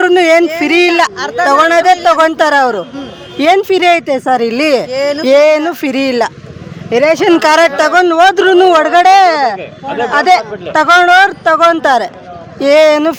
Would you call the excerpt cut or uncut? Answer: uncut